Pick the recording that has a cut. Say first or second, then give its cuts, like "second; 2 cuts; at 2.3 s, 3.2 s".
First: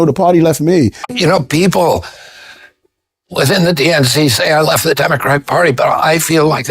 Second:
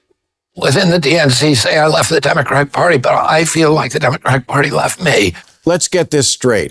second; 1 cut; at 5.5 s